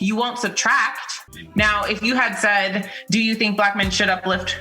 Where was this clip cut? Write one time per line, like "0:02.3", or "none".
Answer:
0:01.3